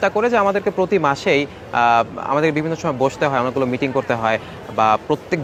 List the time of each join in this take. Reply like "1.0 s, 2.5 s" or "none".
none